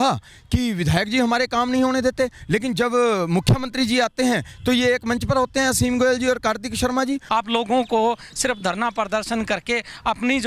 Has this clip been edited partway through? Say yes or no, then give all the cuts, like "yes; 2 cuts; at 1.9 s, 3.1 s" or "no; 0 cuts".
yes; 1 cut; at 7.2 s